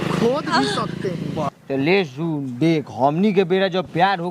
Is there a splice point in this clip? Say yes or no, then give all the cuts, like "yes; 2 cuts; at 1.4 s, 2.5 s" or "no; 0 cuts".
yes; 1 cut; at 1.5 s